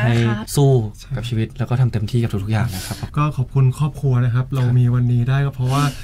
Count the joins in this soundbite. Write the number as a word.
one